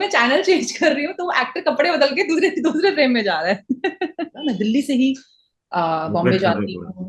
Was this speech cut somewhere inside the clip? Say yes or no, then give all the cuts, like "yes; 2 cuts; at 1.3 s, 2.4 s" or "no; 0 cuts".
yes; 1 cut; at 4.3 s